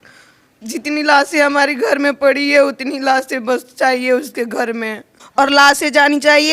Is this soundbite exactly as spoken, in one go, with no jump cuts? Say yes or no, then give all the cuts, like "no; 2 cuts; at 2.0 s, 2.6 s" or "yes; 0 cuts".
no; 1 cut; at 5.2 s